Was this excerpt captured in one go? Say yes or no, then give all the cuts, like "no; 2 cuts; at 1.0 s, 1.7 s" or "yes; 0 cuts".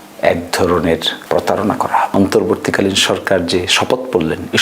no; 2 cuts; at 1.1 s, 2.1 s